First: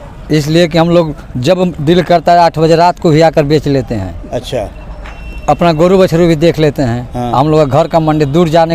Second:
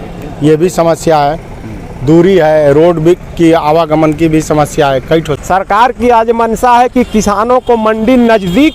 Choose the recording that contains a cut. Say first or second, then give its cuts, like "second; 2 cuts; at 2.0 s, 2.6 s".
second; 1 cut; at 5.3 s